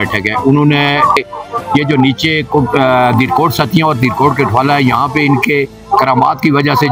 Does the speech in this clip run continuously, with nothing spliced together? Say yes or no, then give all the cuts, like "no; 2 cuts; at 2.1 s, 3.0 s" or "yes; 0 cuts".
no; 1 cut; at 1.2 s